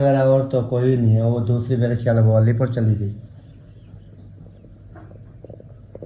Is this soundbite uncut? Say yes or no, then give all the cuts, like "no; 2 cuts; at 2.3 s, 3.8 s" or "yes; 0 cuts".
yes; 0 cuts